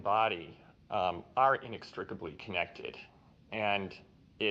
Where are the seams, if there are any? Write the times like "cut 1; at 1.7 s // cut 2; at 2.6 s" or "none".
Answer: none